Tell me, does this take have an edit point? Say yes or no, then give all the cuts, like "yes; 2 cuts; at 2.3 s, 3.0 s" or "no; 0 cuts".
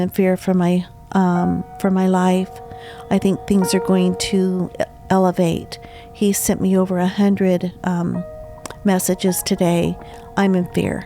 no; 0 cuts